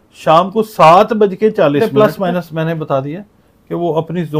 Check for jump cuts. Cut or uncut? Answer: cut